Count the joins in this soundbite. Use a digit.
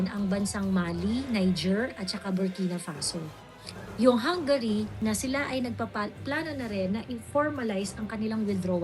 1